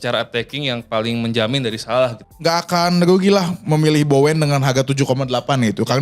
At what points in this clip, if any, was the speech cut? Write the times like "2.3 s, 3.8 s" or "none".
2.2 s